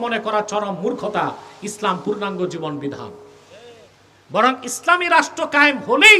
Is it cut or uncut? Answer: uncut